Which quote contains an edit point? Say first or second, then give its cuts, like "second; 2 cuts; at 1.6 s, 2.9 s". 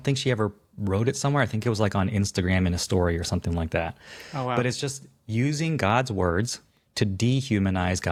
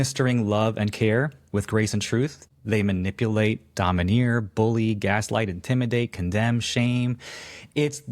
second; 1 cut; at 2.5 s